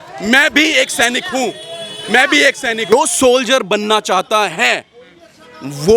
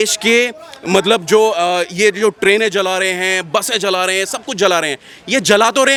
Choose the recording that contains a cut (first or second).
first